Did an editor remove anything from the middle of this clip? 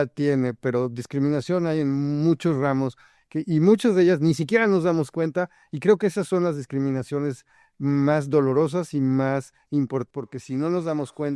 yes; 1 cut; at 10.1 s

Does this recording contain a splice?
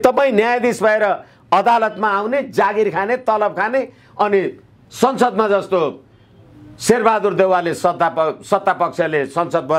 no; 0 cuts

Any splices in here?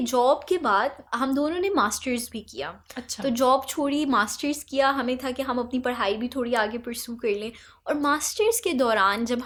no; 0 cuts

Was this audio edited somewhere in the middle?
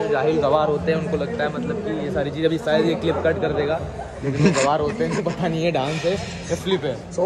no; 0 cuts

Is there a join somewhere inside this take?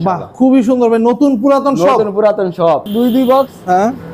yes; 1 cut; at 2.9 s

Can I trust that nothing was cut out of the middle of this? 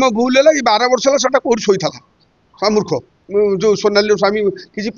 no; 1 cut; at 3.1 s

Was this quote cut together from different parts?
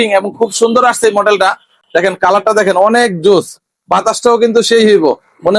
yes; 1 cut; at 1.8 s

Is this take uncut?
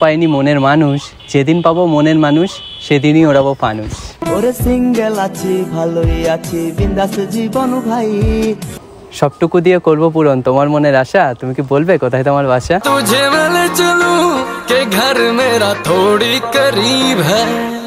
no; 1 cut; at 8.7 s

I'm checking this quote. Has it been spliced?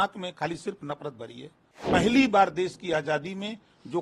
yes; 1 cut; at 1.8 s

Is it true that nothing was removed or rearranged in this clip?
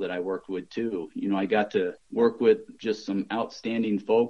no; 2 cuts; at 2.0 s, 2.7 s

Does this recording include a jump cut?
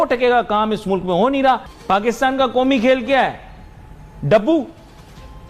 yes; 1 cut; at 1.7 s

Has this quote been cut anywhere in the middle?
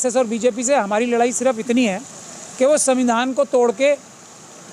no; 0 cuts

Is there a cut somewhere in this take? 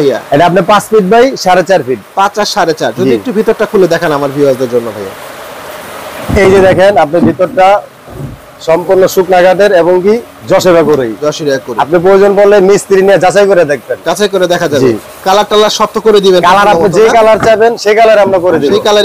no; 0 cuts

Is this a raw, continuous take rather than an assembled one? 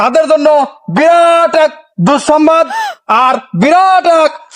yes; 0 cuts

